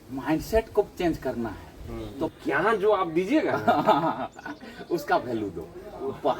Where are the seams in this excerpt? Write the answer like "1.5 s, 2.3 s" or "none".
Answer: 2.3 s